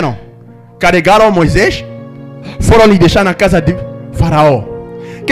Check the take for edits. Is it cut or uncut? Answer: uncut